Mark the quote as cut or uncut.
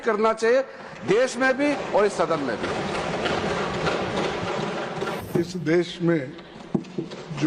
cut